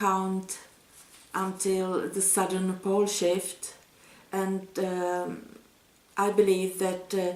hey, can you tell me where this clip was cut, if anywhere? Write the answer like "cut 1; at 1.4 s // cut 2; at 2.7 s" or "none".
none